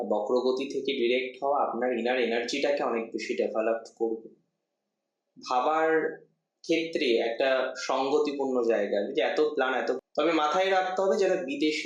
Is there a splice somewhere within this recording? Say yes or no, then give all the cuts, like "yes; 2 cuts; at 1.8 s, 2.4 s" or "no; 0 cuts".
yes; 1 cut; at 10.0 s